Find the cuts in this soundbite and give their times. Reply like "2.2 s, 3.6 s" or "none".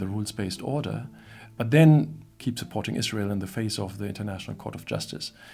2.2 s